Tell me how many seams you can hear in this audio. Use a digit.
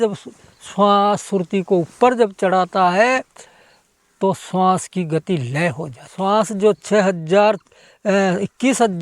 1